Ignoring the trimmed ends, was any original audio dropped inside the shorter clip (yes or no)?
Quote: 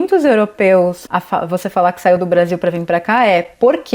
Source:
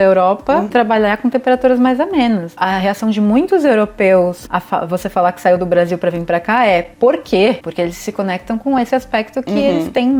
no